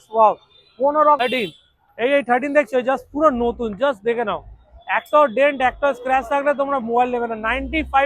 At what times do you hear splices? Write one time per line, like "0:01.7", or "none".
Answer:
0:01.2